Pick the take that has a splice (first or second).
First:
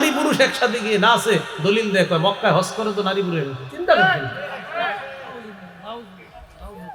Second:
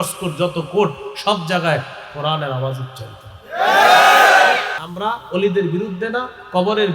second